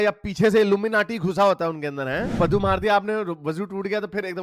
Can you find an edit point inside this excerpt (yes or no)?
yes